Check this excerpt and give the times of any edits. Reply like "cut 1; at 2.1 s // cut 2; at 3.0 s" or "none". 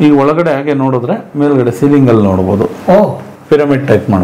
none